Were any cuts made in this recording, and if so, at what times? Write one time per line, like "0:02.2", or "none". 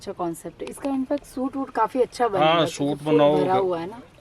none